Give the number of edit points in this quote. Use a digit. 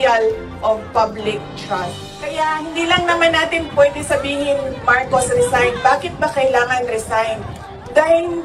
1